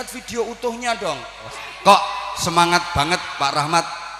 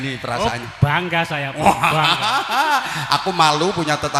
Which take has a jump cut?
first; 1 cut; at 1.5 s

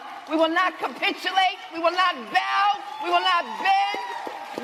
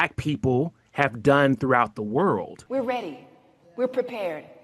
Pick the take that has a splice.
second; 1 cut; at 2.6 s

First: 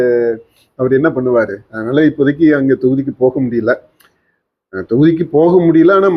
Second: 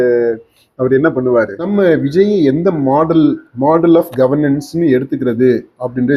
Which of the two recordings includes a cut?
second; 1 cut; at 1.6 s

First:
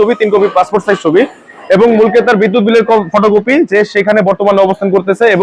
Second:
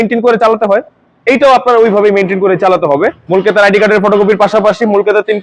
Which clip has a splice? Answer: second; 1 cut; at 3.2 s

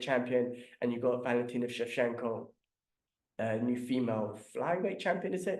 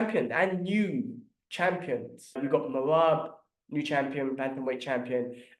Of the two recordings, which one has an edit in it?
second; 1 cut; at 2.4 s

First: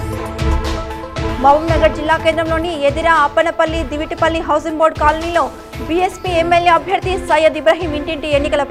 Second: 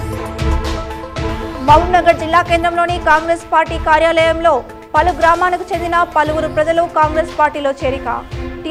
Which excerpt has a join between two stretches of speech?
first; 1 cut; at 1.4 s

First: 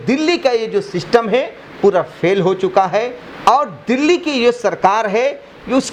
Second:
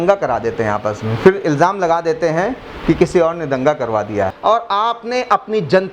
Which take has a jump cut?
second; 1 cut; at 4.4 s

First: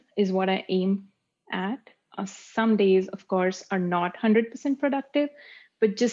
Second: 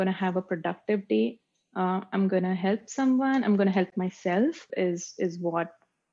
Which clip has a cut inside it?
second; 1 cut; at 4.7 s

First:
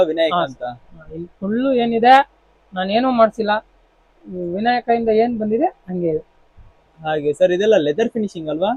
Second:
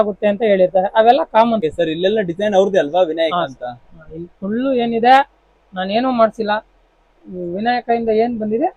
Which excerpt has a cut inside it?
second; 1 cut; at 1.6 s

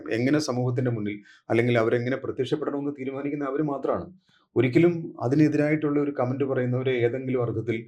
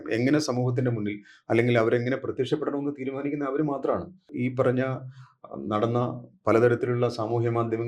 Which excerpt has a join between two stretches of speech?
second; 1 cut; at 4.3 s

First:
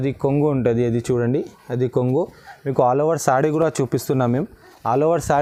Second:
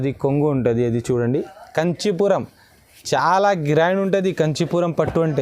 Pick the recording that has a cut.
second; 1 cut; at 1.6 s

